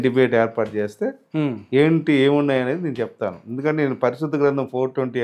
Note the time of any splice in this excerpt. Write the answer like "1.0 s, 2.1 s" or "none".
none